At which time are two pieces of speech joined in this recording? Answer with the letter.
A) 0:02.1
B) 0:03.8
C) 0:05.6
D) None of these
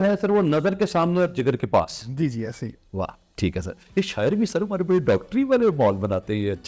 D